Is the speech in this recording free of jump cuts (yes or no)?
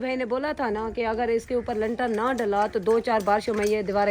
yes